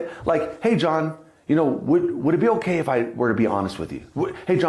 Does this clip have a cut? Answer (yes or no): no